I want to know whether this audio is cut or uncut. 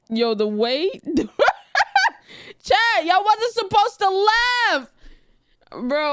uncut